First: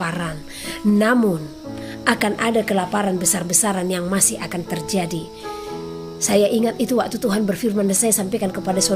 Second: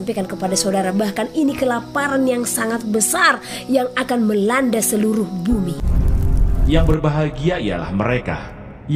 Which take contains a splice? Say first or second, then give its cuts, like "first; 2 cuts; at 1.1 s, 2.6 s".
second; 1 cut; at 5.8 s